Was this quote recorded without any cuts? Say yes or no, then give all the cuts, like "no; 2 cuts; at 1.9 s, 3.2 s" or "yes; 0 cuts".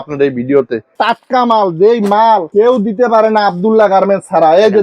no; 1 cut; at 1.0 s